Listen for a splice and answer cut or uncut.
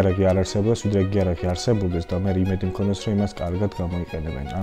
uncut